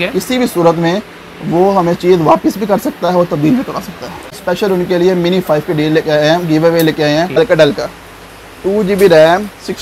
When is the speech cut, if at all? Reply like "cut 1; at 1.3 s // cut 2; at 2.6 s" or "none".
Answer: cut 1; at 4.3 s // cut 2; at 7.4 s